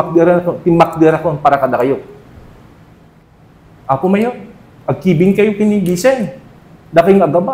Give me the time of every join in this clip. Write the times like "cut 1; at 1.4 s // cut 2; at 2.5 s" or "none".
cut 1; at 3.2 s